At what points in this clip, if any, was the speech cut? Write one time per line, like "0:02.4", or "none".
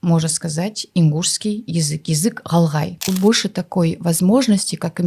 0:03.0